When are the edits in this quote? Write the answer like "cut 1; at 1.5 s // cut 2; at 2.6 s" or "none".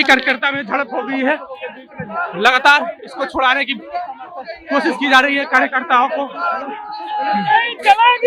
none